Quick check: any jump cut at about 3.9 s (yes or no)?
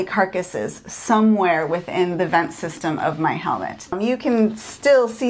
yes